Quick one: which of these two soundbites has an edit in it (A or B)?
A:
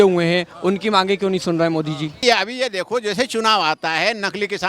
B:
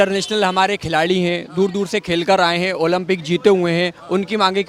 A